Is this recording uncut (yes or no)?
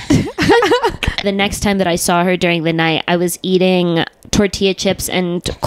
no